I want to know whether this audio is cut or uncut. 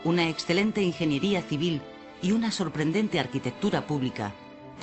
uncut